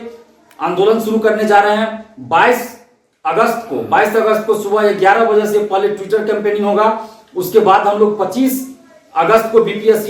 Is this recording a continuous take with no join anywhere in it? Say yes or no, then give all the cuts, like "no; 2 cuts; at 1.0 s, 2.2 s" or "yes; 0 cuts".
yes; 0 cuts